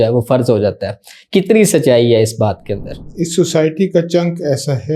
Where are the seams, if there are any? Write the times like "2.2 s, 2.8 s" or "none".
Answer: 3.0 s